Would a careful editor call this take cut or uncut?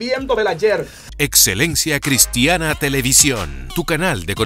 cut